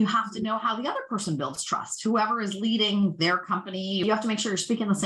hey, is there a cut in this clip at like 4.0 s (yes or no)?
yes